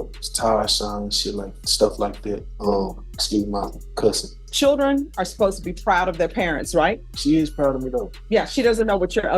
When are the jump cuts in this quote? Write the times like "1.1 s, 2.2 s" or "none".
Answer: 2.5 s, 4.5 s, 7.1 s, 8.1 s